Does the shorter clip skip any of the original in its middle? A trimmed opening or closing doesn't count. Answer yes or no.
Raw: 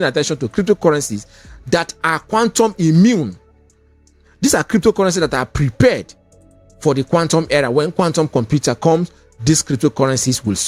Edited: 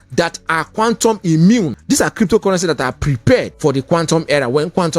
yes